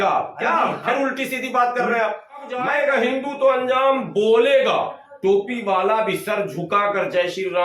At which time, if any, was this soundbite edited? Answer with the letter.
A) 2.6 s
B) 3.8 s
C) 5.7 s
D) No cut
A